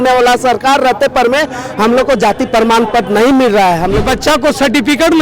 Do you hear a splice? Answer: yes; 1 cut; at 4.0 s

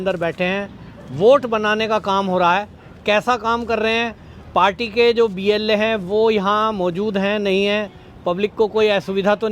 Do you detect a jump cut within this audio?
no; 0 cuts

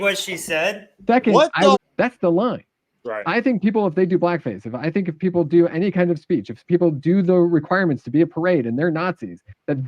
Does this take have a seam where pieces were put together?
yes; 1 cut; at 1.8 s

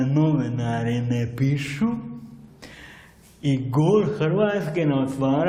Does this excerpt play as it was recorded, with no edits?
yes; 0 cuts

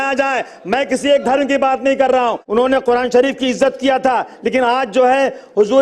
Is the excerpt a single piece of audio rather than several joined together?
no; 1 cut; at 2.2 s

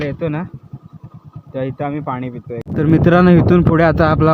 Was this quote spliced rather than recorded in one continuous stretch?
yes; 1 cut; at 2.7 s

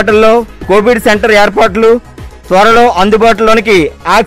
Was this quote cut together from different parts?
no; 0 cuts

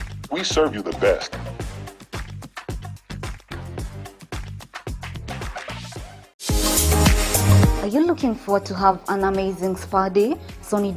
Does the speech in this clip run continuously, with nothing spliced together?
no; 1 cut; at 6.4 s

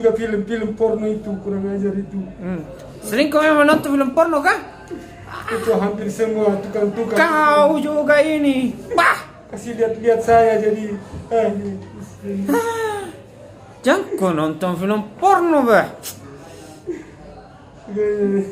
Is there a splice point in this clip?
no; 0 cuts

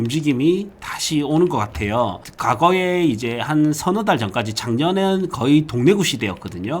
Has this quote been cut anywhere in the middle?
yes; 1 cut; at 2.3 s

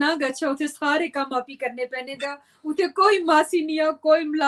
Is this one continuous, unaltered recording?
yes; 0 cuts

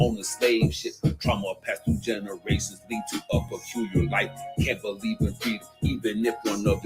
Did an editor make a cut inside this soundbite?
no; 0 cuts

